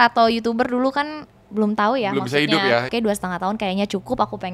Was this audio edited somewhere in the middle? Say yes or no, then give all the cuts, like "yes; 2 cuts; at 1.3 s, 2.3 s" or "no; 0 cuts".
yes; 1 cut; at 2.9 s